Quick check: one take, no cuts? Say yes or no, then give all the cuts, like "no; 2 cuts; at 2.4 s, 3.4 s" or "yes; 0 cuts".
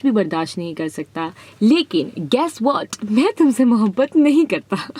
yes; 0 cuts